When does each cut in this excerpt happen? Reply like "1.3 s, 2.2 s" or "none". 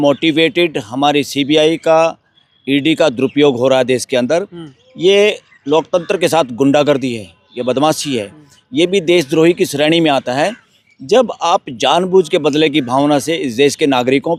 none